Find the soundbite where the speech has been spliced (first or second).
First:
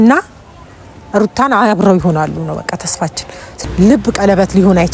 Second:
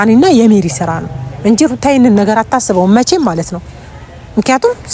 first